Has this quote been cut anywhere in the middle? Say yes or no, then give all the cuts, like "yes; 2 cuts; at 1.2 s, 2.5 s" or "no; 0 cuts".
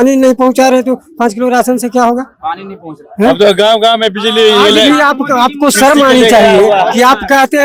no; 0 cuts